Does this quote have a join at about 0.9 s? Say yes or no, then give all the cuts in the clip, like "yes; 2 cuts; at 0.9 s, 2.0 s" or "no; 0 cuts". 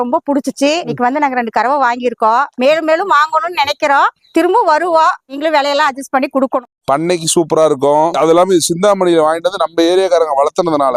yes; 2 cuts; at 0.9 s, 6.7 s